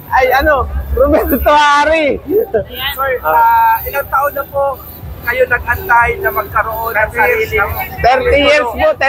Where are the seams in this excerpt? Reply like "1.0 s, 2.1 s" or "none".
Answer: none